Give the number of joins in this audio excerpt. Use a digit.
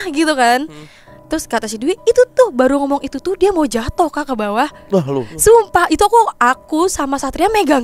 0